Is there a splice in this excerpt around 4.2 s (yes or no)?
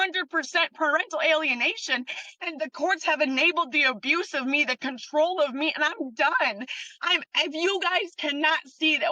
no